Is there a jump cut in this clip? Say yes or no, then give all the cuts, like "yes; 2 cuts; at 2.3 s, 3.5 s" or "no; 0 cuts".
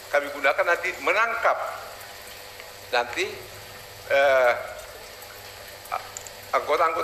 no; 0 cuts